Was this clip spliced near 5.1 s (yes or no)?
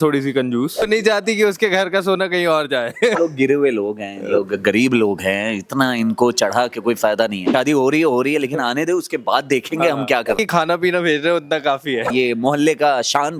no